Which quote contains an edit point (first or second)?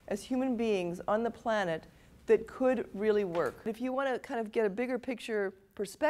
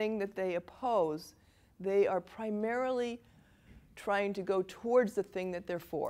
first